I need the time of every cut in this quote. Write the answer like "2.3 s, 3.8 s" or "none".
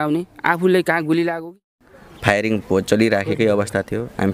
1.5 s